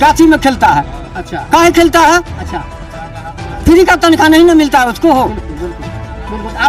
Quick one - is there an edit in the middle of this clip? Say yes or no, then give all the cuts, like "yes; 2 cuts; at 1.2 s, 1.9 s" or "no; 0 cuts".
no; 0 cuts